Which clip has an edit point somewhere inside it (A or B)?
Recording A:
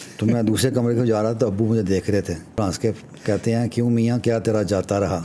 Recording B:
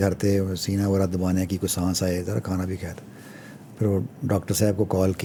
A